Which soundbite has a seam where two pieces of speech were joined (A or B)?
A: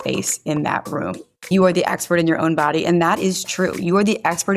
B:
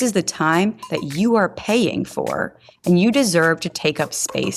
A